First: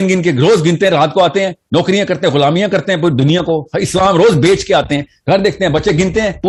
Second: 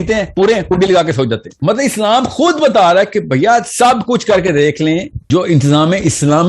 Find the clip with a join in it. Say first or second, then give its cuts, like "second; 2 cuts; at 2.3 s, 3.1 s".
second; 2 cuts; at 1.5 s, 5.2 s